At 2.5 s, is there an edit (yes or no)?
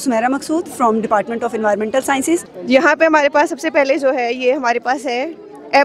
yes